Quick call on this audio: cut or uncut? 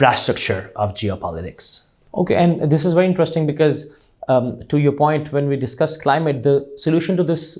uncut